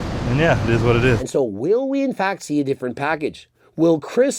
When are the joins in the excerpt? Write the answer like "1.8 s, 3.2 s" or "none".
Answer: 1.2 s